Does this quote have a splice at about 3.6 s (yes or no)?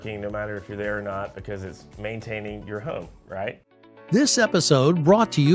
yes